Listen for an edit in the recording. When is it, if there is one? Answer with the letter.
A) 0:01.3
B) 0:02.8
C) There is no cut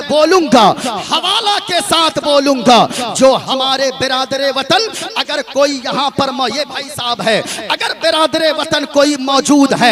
C